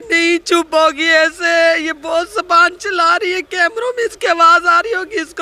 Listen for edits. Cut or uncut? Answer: uncut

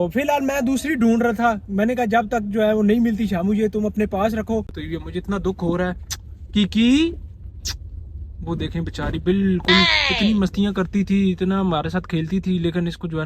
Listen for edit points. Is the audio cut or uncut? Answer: cut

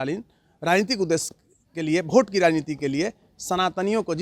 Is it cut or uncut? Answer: uncut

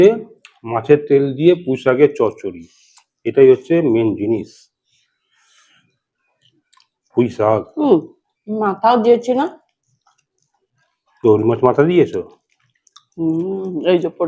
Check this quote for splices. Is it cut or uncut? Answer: uncut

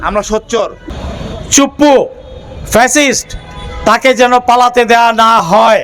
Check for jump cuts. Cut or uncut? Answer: cut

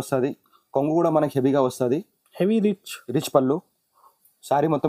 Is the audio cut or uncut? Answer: uncut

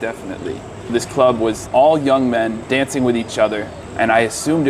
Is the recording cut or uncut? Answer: cut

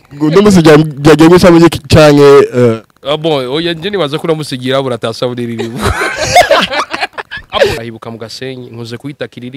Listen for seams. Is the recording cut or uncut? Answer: cut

